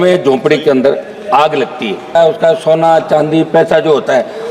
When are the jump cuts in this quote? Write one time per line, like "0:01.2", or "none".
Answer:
0:02.1